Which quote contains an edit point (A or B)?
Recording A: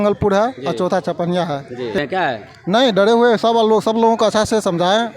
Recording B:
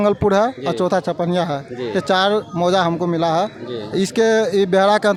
A